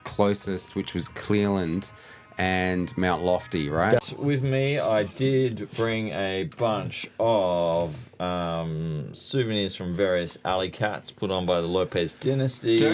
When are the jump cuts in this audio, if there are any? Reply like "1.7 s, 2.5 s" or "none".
4.0 s